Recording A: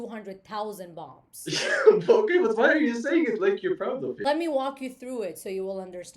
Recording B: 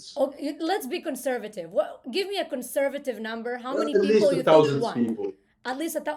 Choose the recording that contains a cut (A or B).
A